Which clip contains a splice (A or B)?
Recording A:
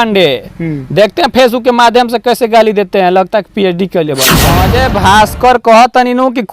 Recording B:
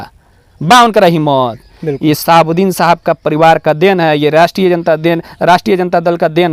A